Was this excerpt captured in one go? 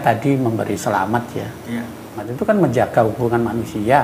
no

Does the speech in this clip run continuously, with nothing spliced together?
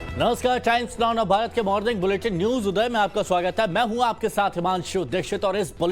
no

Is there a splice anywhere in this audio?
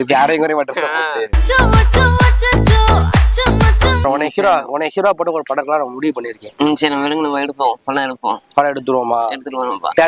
yes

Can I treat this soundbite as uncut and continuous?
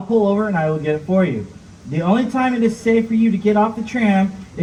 yes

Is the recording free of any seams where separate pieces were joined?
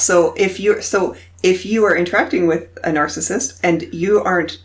yes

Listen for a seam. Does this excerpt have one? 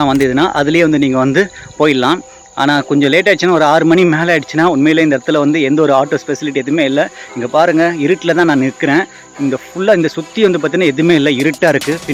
no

